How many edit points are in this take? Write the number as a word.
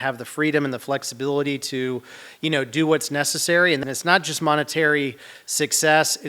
one